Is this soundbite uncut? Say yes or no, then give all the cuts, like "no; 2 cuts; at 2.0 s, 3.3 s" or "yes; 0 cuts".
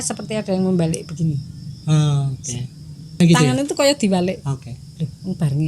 no; 1 cut; at 3.2 s